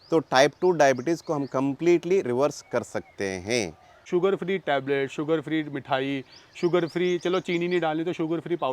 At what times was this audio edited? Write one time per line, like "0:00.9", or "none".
0:03.9